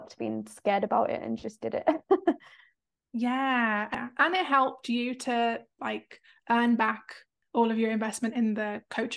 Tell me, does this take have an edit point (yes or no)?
yes